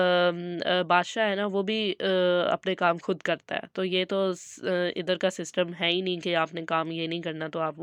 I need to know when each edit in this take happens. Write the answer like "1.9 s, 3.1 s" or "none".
none